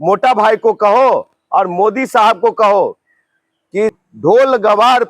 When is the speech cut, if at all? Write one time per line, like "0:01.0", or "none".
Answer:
0:03.9